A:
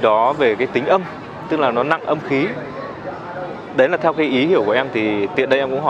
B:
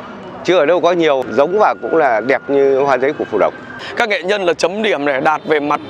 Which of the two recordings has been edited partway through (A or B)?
B